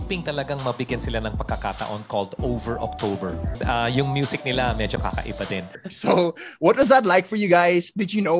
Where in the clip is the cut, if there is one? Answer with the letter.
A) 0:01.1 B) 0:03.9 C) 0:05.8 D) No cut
D